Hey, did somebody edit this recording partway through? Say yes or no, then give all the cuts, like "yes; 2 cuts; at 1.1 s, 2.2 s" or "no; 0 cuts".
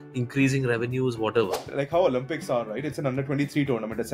yes; 1 cut; at 1.6 s